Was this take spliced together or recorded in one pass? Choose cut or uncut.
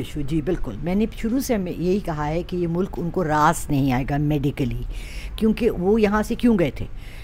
uncut